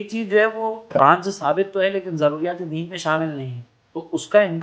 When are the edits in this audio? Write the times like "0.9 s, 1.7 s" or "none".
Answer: 1.0 s